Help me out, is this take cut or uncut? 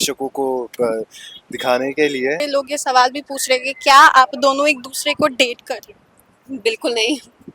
cut